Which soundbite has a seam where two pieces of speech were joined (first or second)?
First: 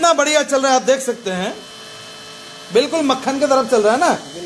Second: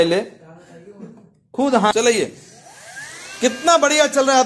second